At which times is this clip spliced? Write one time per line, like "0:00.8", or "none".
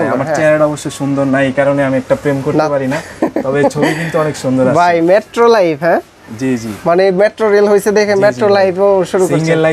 none